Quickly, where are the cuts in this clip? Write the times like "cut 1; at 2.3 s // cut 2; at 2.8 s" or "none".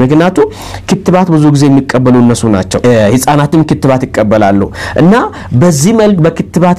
none